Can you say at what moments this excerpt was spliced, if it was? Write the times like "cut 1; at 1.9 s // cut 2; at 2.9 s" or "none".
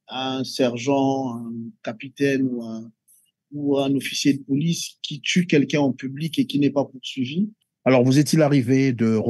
cut 1; at 7.7 s